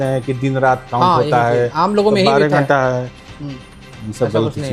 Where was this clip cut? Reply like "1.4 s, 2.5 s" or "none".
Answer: none